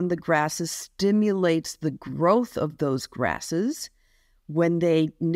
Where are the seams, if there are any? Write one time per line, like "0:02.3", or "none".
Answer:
none

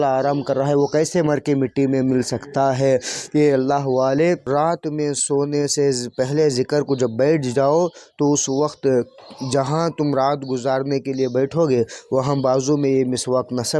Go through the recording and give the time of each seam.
0:04.4

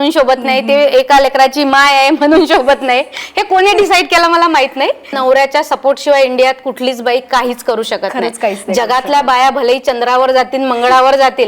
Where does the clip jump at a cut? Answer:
0:05.1

